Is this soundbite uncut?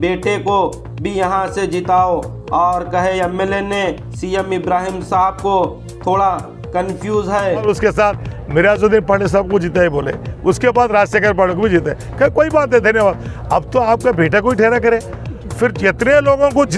no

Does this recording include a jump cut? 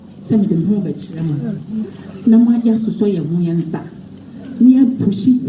no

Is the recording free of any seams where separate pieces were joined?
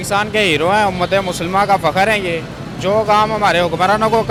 yes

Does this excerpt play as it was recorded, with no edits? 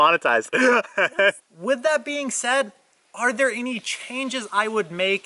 no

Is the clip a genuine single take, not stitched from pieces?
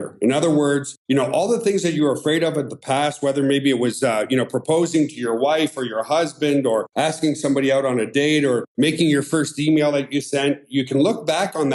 no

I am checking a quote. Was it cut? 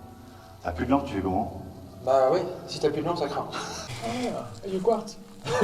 yes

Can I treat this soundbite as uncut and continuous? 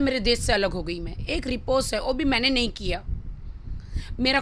yes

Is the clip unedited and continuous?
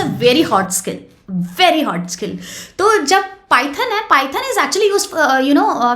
yes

